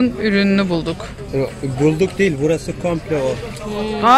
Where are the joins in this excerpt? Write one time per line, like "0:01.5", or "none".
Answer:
none